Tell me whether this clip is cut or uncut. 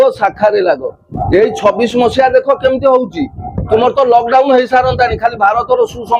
cut